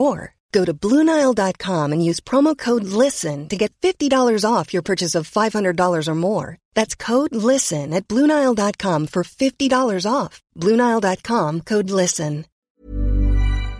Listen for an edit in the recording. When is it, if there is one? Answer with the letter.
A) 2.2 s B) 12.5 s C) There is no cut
B